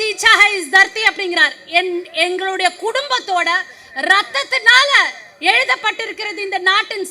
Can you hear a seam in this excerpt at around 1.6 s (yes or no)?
no